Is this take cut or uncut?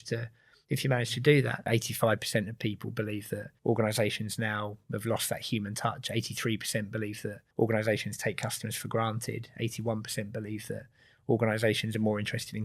cut